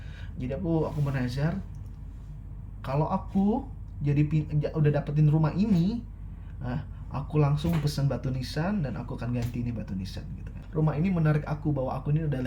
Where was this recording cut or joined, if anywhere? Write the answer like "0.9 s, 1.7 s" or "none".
10.6 s